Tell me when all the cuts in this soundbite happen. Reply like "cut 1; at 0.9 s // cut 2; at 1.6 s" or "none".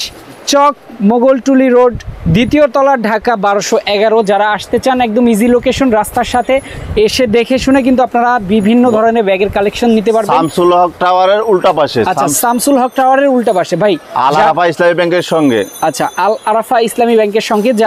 none